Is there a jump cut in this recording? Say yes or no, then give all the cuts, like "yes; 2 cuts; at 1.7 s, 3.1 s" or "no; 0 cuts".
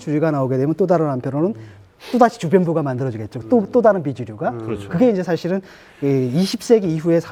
no; 0 cuts